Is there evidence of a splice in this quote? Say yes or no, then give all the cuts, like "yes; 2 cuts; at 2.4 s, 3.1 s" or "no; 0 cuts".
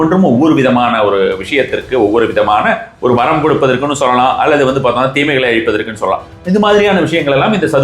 no; 0 cuts